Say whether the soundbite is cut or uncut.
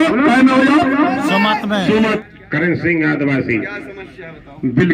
cut